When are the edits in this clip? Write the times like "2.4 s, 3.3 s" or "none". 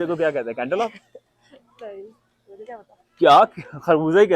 none